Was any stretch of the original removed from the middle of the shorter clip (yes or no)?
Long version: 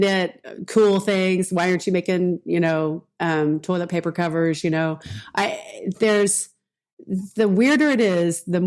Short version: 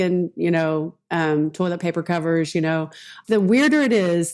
yes